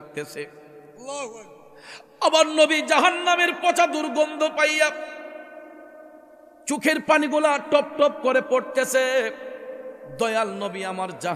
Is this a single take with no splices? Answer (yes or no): yes